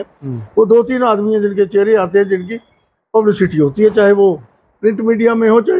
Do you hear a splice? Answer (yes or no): no